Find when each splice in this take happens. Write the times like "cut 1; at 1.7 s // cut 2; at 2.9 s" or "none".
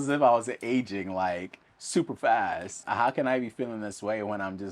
cut 1; at 2.8 s